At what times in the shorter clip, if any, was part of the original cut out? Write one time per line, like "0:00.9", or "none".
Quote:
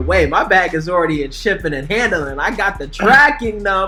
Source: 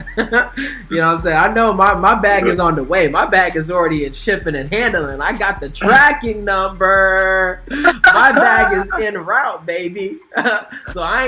none